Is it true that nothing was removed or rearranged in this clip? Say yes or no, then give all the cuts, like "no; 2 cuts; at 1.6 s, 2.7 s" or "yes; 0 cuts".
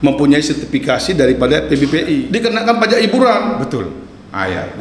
no; 1 cut; at 2.3 s